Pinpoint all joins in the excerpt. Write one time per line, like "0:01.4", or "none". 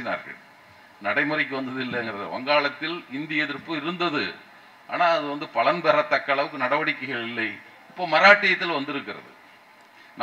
none